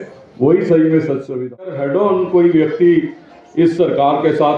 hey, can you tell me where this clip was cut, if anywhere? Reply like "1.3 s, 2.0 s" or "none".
1.6 s